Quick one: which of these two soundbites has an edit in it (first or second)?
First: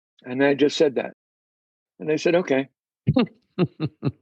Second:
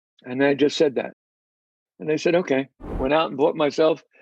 second